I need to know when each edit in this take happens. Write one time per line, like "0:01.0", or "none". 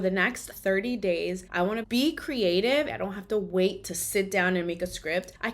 0:01.8
0:02.9